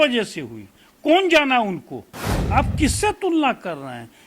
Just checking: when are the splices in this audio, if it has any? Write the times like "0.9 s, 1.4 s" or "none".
2.3 s